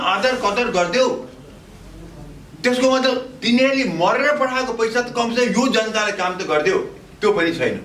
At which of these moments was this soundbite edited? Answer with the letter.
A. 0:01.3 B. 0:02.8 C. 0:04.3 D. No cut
D